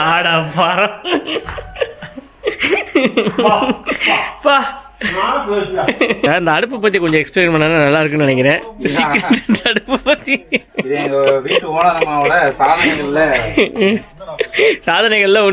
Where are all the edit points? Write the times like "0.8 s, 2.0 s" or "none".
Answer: 6.3 s